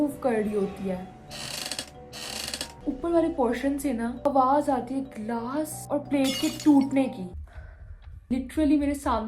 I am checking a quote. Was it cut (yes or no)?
yes